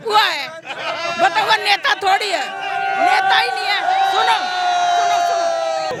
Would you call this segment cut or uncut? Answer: uncut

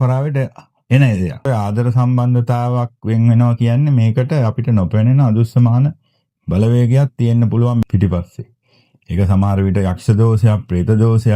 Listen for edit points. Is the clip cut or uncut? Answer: cut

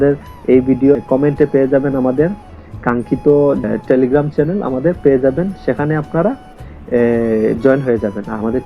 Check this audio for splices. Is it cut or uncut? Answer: cut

